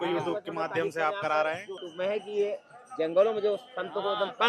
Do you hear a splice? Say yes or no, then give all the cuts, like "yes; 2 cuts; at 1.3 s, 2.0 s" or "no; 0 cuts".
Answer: yes; 1 cut; at 1.8 s